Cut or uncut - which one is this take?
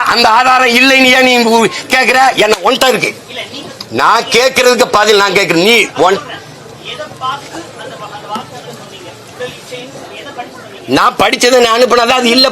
uncut